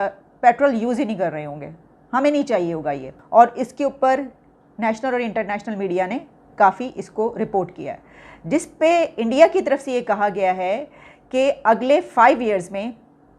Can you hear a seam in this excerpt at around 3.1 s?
yes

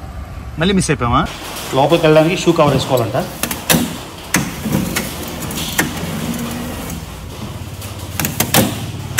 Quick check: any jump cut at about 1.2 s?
yes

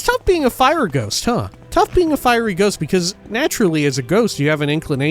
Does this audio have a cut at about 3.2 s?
yes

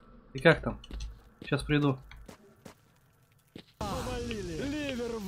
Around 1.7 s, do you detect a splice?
no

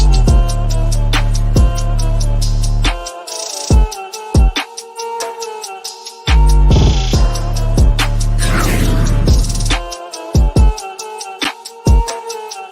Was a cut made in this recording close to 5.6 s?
no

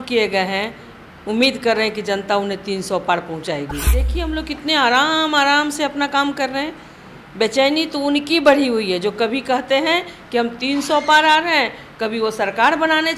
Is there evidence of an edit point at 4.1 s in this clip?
yes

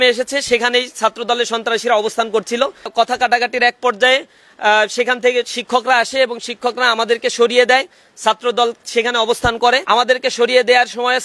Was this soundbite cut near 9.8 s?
yes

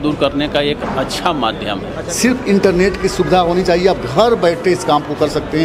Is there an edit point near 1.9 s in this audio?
yes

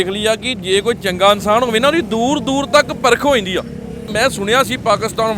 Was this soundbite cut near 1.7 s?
no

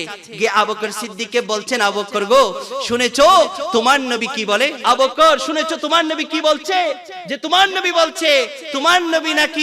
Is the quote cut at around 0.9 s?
no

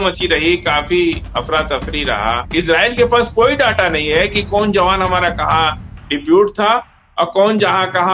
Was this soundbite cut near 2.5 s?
yes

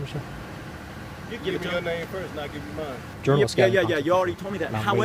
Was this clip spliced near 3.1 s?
yes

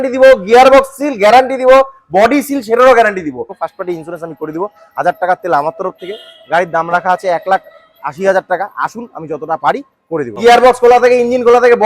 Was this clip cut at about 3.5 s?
yes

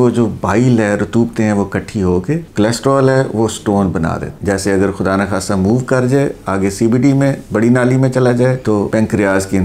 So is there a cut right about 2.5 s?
yes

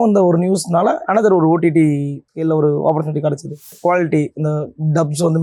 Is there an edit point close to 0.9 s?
no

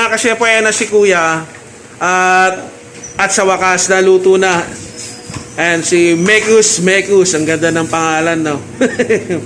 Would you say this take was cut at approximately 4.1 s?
no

